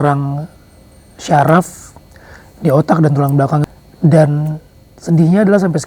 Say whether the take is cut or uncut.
cut